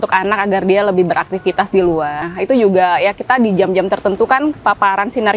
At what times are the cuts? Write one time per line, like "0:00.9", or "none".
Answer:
0:02.2